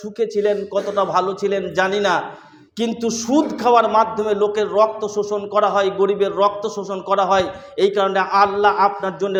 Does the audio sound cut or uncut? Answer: uncut